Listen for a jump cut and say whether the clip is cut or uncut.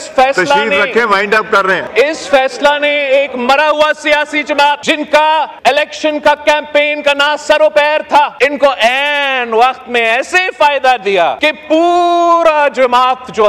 cut